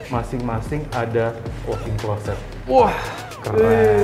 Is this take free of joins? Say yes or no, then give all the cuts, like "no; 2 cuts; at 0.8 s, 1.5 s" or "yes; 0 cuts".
yes; 0 cuts